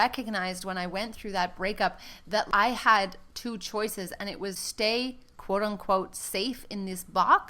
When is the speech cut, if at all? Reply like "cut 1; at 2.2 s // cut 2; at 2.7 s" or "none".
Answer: cut 1; at 2.5 s // cut 2; at 4.6 s